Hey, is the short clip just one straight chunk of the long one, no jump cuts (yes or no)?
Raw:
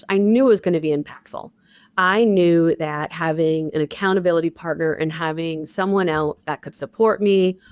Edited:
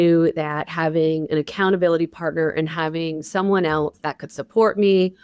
yes